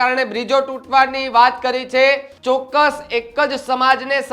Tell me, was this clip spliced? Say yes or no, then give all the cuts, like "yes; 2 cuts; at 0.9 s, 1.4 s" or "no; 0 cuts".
yes; 1 cut; at 2.3 s